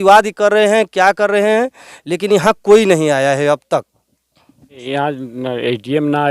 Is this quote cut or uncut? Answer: cut